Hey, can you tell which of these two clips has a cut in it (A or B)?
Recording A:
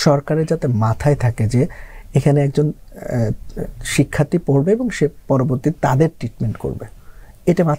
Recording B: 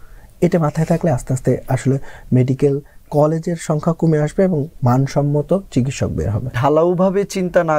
B